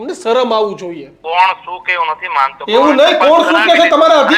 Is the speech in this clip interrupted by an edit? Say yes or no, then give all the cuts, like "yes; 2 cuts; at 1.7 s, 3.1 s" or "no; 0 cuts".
yes; 1 cut; at 1.2 s